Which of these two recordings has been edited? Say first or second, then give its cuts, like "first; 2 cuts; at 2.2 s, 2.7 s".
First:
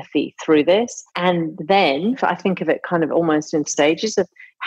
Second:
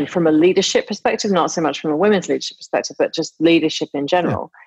first; 3 cuts; at 1.3 s, 2.2 s, 3.7 s